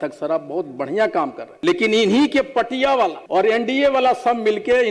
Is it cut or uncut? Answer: cut